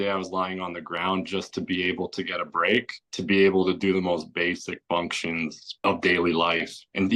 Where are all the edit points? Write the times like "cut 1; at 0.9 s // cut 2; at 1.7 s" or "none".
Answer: none